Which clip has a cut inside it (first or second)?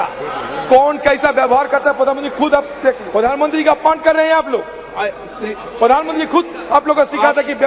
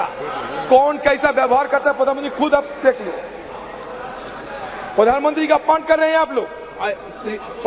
first